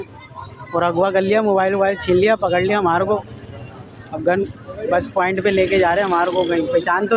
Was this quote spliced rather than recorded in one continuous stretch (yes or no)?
no